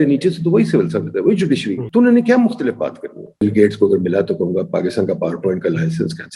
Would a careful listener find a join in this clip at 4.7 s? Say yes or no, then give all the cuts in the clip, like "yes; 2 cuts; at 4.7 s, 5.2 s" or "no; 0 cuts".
no; 2 cuts; at 1.8 s, 3.4 s